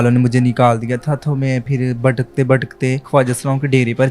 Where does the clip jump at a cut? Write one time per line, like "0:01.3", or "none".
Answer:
0:03.0